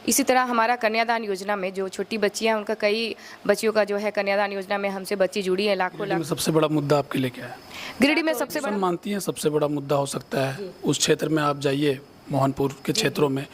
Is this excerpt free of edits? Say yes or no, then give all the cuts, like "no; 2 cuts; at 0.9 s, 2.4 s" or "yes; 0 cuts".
no; 2 cuts; at 6.1 s, 8.5 s